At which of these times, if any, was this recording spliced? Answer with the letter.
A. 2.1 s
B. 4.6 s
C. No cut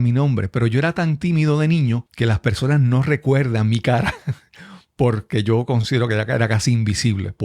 A